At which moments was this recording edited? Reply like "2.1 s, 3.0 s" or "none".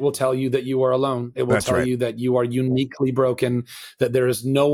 none

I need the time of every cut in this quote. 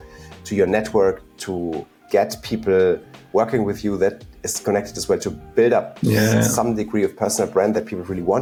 none

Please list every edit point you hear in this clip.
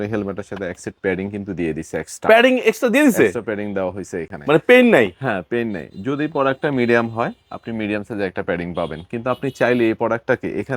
none

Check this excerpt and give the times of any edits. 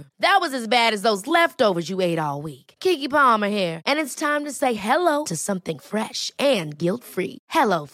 none

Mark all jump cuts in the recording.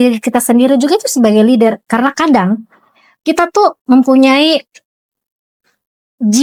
none

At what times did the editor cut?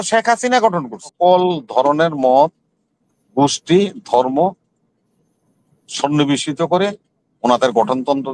1.1 s

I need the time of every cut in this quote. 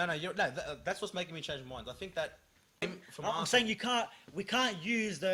2.8 s

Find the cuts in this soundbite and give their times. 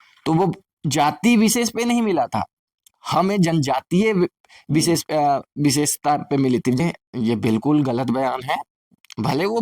6.8 s

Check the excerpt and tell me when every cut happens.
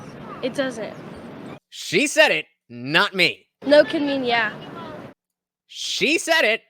1.5 s, 5.1 s

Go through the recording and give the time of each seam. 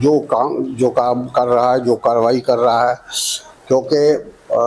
none

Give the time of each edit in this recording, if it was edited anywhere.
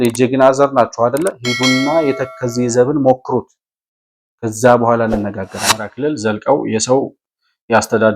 5.9 s

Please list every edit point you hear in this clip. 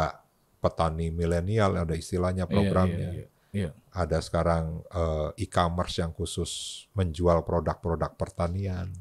none

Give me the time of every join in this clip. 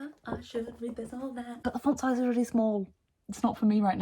1.6 s

